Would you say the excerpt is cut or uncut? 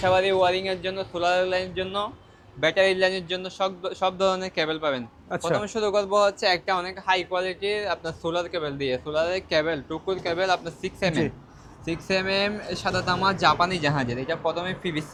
uncut